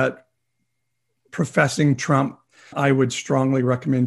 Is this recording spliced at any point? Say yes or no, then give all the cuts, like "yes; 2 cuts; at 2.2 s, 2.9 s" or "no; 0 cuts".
yes; 1 cut; at 2.7 s